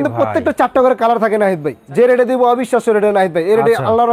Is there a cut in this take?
yes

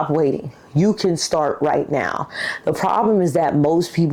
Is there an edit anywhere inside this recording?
no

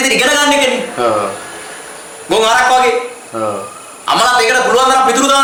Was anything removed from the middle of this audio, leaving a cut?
no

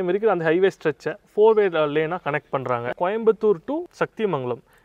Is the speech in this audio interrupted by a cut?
yes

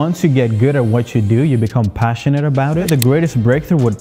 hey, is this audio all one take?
no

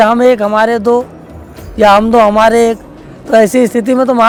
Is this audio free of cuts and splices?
yes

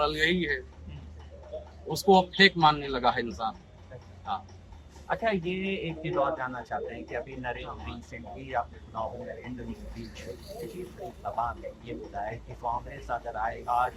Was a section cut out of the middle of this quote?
no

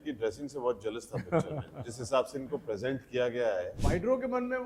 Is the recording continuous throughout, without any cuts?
no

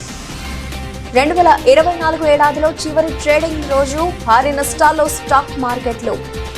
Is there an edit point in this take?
no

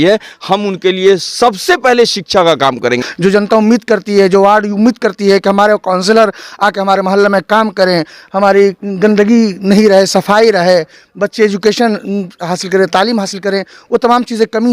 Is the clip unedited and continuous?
no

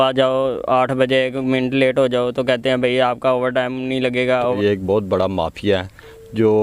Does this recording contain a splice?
yes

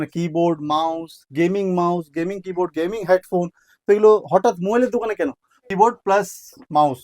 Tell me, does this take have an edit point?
yes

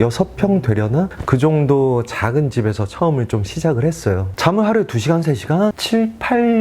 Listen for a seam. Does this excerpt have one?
yes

